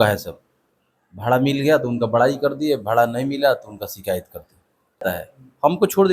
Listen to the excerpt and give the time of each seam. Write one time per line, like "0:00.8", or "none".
0:05.0